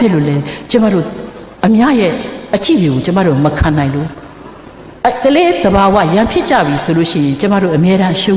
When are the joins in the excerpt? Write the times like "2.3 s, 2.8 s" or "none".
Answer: none